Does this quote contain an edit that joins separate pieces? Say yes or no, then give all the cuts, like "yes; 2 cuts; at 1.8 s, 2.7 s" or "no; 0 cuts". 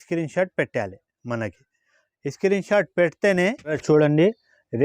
yes; 1 cut; at 3.8 s